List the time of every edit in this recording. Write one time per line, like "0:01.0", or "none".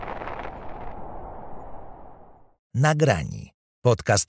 none